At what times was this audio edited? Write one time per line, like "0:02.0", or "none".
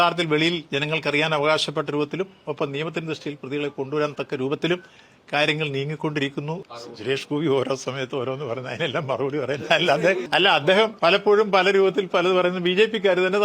0:06.6
0:10.6